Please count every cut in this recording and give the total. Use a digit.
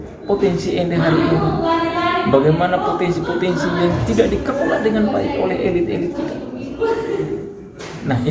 0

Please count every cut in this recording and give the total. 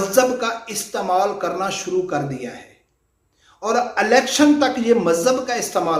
0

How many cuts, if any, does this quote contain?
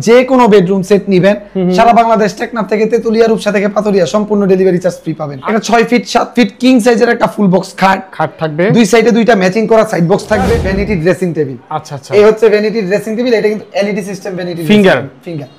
2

